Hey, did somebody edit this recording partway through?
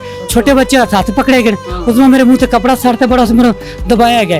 no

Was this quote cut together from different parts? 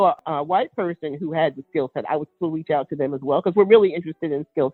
no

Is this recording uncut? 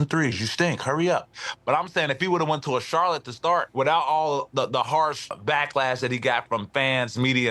no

